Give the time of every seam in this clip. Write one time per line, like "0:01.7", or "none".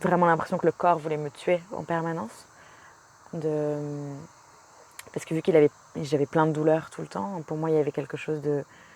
none